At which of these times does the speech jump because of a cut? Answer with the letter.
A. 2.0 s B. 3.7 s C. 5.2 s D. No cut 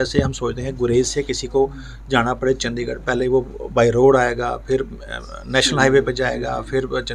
D